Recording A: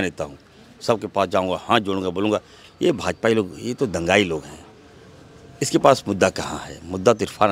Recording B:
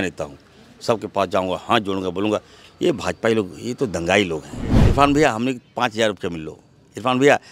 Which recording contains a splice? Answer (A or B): B